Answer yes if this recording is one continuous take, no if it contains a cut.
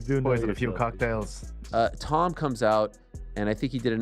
no